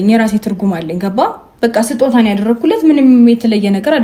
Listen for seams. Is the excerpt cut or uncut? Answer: uncut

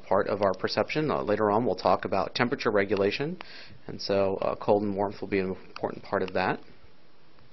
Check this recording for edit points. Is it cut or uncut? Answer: uncut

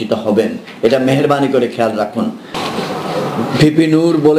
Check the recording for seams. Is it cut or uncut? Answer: cut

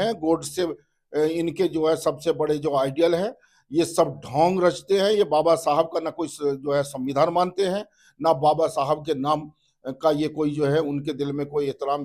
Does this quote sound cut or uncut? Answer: uncut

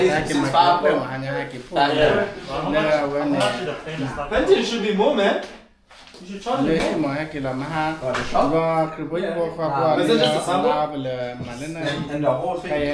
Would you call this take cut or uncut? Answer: uncut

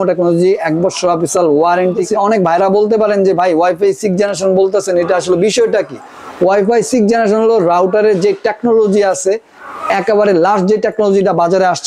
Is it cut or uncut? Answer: cut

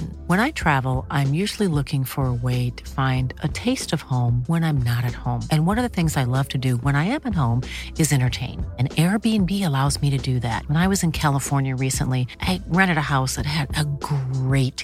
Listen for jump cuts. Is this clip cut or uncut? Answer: uncut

